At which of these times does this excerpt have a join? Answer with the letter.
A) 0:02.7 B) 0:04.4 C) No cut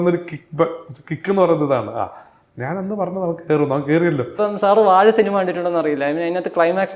B